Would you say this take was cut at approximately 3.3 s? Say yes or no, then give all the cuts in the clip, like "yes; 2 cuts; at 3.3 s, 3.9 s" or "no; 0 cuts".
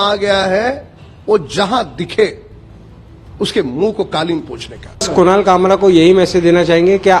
no; 1 cut; at 5.1 s